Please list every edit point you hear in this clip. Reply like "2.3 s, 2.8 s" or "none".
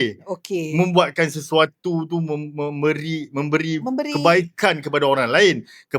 none